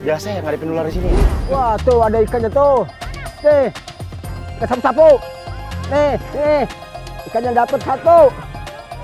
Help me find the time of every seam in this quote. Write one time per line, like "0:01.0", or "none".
0:01.4